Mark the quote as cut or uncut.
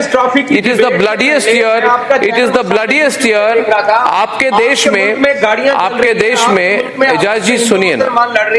uncut